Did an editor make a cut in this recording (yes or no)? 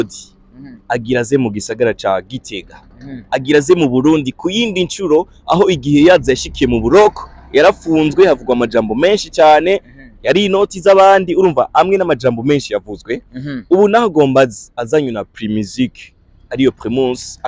no